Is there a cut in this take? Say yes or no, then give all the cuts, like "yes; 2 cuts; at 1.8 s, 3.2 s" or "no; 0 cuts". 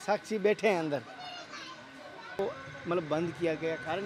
yes; 1 cut; at 2.4 s